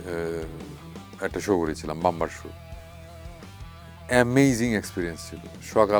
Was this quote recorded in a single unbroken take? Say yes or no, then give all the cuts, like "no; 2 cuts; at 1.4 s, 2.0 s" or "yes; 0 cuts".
yes; 0 cuts